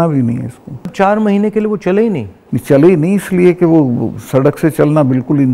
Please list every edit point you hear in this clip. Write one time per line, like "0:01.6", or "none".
0:00.9